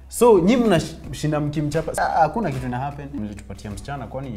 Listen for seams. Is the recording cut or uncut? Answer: cut